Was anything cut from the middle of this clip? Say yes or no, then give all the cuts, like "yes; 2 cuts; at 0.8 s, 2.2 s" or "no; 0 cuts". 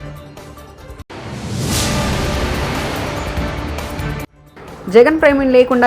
yes; 2 cuts; at 1.0 s, 4.3 s